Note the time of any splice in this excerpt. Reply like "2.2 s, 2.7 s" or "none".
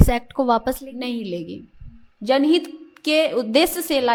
none